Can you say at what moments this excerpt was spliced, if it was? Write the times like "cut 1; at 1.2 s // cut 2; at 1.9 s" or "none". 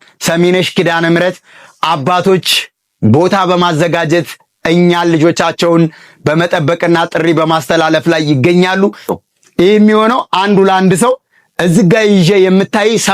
cut 1; at 9.1 s